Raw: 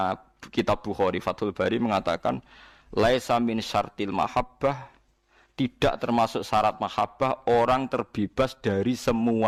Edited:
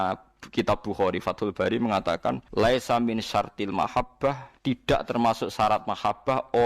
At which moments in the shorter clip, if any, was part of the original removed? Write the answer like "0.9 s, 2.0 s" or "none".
2.4 s, 4.5 s